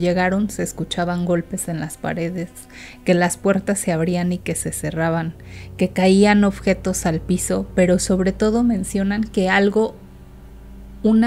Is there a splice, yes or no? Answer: no